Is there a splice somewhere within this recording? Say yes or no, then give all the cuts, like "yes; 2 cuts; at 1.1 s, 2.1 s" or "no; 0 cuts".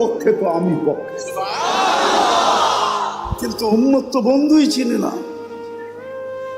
yes; 1 cut; at 5.4 s